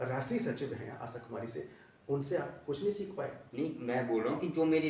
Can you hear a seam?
no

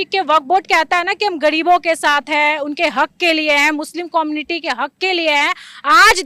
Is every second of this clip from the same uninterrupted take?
yes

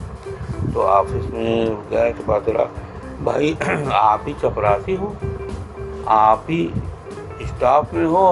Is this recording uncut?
yes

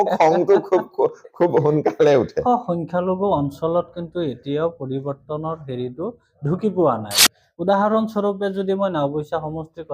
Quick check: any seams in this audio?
yes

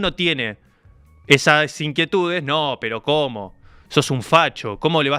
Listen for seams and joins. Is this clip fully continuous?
yes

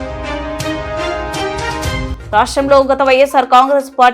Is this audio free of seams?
no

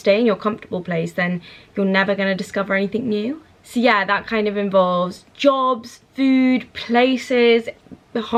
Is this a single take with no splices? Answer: yes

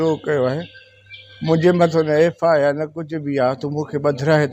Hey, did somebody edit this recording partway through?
no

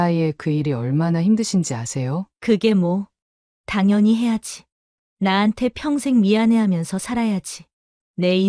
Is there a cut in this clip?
yes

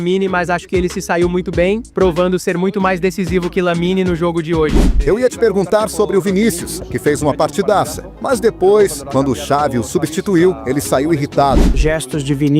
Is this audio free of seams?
no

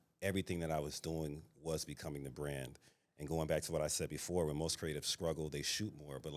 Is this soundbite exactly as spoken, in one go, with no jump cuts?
yes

